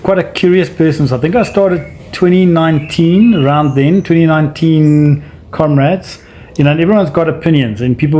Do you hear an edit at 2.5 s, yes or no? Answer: no